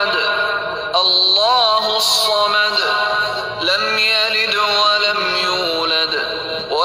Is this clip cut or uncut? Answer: uncut